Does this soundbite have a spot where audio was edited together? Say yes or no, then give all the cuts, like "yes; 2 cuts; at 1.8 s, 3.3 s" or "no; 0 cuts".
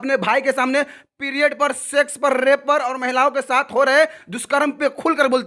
no; 0 cuts